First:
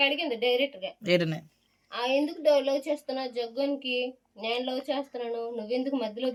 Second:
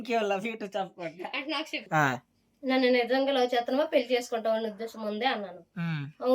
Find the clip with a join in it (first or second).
second